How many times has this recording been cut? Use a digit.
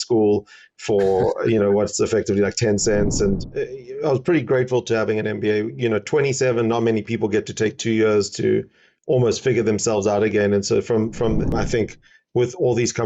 2